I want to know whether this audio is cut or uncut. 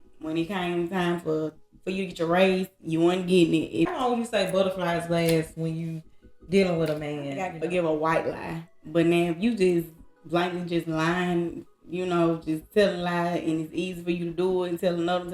cut